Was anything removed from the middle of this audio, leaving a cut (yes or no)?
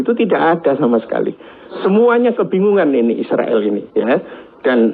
no